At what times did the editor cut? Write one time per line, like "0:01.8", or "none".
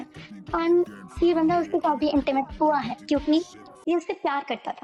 none